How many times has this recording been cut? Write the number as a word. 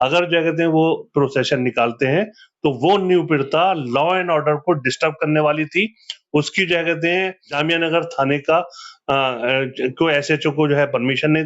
one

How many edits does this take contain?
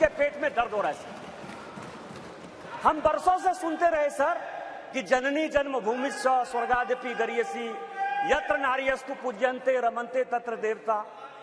zero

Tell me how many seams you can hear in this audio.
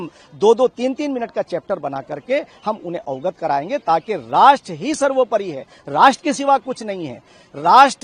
zero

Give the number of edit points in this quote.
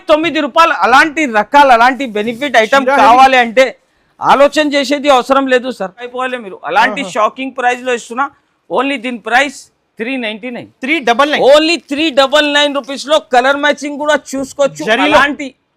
one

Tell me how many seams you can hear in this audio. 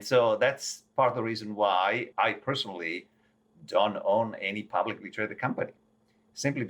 one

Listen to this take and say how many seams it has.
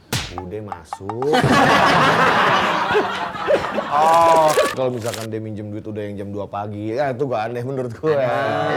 one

